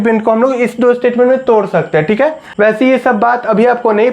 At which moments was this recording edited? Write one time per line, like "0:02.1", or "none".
0:02.4